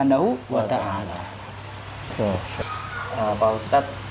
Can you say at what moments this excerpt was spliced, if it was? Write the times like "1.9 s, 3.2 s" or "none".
2.6 s